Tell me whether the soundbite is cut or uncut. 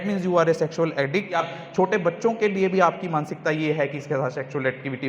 cut